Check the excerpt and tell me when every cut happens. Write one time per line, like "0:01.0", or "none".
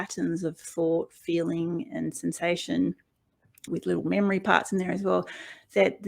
0:03.7